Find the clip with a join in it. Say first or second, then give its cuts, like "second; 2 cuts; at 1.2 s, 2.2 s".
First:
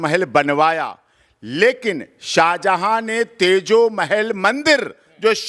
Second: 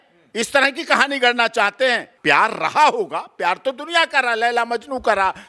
second; 1 cut; at 2.1 s